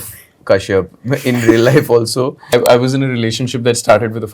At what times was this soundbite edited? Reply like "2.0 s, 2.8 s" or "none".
2.5 s